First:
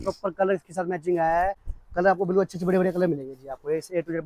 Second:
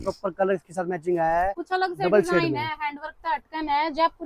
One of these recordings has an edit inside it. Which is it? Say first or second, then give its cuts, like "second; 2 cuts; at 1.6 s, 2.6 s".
second; 1 cut; at 1.6 s